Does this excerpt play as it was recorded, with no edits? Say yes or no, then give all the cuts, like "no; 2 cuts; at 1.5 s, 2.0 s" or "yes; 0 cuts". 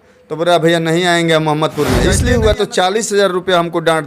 no; 1 cut; at 2.1 s